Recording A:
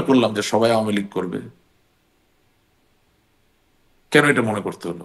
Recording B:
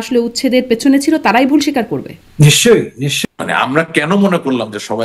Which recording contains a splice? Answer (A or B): B